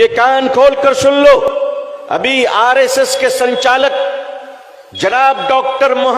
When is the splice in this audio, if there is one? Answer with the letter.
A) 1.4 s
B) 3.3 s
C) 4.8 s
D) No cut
A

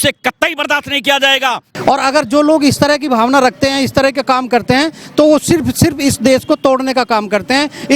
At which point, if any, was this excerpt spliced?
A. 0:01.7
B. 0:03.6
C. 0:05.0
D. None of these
A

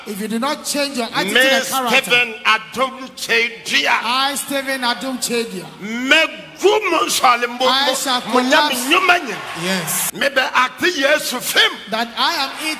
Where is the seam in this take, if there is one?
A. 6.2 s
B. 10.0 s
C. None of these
B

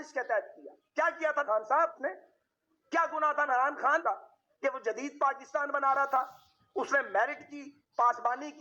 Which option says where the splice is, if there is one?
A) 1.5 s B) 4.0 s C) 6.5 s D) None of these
D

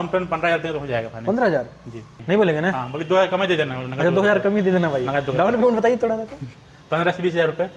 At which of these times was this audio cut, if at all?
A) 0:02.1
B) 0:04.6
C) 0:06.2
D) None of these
A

